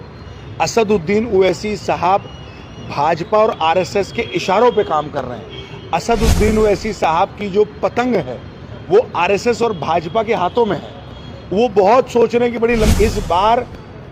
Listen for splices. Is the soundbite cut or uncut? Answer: cut